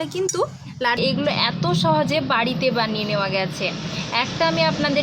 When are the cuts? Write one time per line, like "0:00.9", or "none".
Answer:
0:01.0